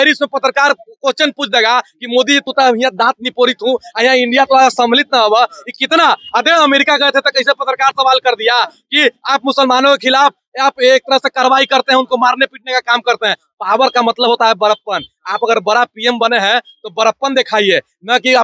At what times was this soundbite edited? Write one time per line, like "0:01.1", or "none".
none